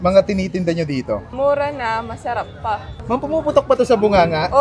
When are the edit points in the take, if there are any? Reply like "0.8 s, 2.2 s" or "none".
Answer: 1.3 s